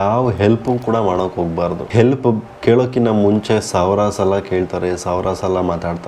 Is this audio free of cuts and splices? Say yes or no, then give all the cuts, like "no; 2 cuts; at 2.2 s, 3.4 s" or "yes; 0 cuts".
yes; 0 cuts